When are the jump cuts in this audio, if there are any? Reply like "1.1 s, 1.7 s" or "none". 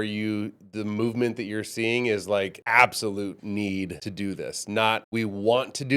2.6 s, 4.0 s, 5.0 s